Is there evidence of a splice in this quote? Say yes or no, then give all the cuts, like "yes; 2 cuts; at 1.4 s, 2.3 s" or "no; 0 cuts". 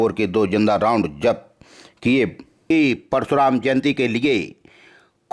yes; 1 cut; at 2.5 s